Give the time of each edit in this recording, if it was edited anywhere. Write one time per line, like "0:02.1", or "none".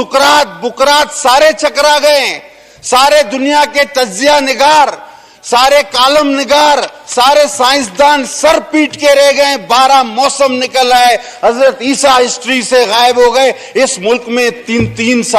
none